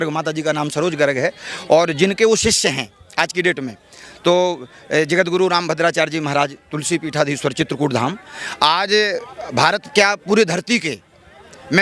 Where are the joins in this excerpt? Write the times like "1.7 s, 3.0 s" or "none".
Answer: none